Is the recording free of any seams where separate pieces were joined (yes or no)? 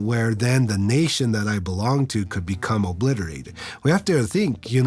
yes